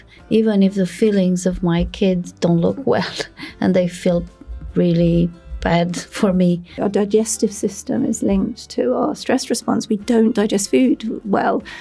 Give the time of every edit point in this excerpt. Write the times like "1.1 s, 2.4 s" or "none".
6.8 s